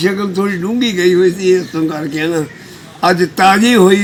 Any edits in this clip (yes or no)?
no